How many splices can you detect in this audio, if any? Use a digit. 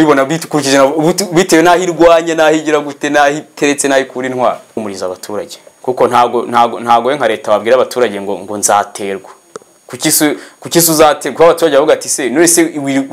1